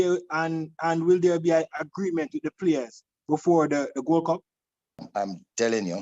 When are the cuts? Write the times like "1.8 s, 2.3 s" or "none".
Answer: 5.1 s